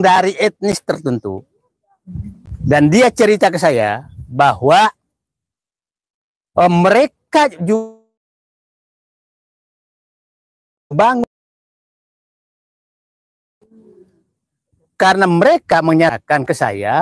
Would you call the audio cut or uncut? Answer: uncut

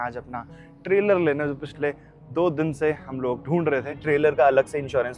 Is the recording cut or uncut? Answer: cut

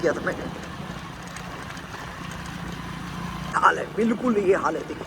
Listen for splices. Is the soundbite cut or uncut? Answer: cut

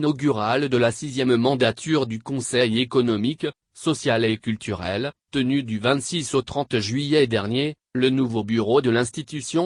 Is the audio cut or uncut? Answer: uncut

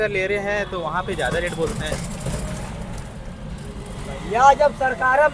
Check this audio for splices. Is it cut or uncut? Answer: uncut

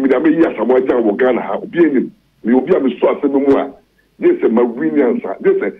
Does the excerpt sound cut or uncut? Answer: uncut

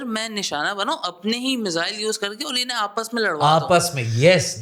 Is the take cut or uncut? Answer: uncut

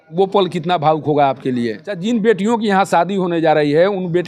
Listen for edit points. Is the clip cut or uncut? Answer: cut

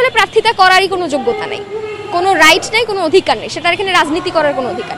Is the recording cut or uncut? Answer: uncut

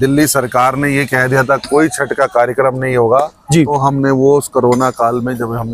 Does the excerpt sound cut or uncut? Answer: uncut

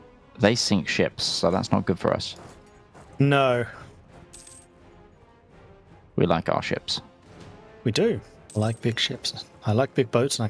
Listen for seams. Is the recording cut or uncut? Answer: cut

